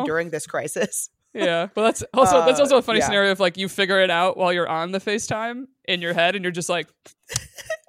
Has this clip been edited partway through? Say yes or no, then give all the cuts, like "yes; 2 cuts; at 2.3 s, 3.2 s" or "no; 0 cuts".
yes; 1 cut; at 1.7 s